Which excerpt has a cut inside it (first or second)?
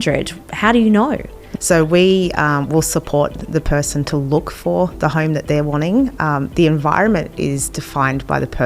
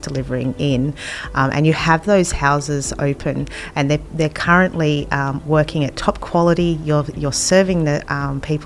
first